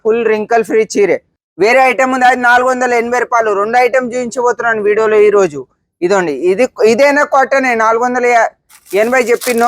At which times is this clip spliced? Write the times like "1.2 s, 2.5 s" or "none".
1.4 s

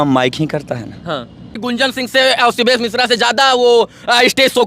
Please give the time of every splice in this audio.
1.5 s

